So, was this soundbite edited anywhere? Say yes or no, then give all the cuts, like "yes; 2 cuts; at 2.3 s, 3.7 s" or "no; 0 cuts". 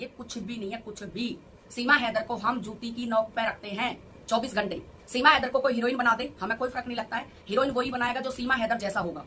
no; 0 cuts